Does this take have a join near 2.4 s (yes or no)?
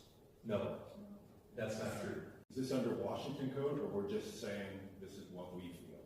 yes